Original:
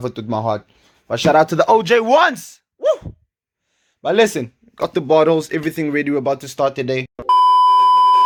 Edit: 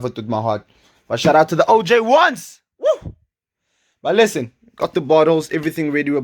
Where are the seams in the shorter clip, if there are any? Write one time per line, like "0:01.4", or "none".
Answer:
none